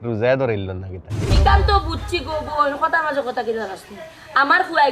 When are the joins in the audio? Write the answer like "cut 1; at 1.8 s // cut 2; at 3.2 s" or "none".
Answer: cut 1; at 1.3 s

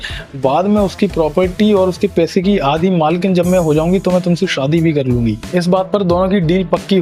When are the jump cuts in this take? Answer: none

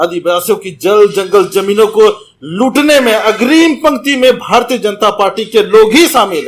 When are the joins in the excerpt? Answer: none

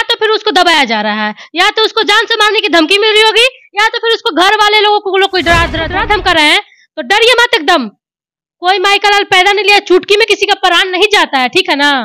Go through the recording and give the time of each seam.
cut 1; at 5.8 s

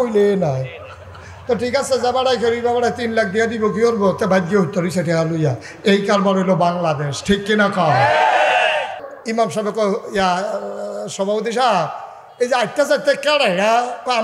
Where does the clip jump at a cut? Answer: cut 1; at 9.0 s

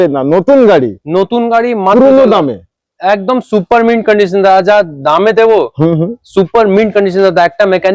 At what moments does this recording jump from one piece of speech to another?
none

